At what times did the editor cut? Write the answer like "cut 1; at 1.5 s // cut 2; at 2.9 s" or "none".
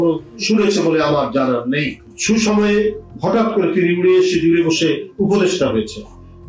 none